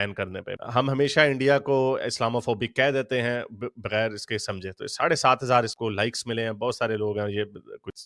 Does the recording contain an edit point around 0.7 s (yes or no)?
no